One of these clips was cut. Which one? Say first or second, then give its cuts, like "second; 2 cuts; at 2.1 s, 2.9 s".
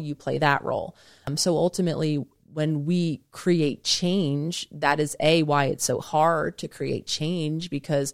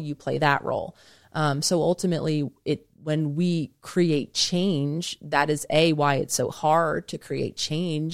first; 2 cuts; at 1.3 s, 2.3 s